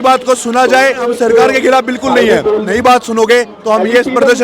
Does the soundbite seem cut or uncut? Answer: cut